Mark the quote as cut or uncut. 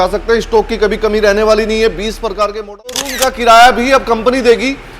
cut